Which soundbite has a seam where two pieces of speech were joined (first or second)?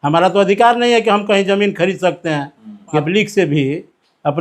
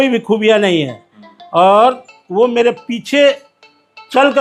first